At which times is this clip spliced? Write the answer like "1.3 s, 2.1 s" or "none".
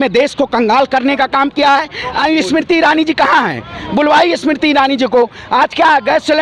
2.2 s